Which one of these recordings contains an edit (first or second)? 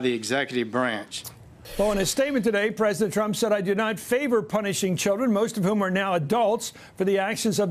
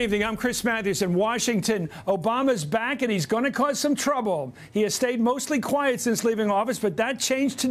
second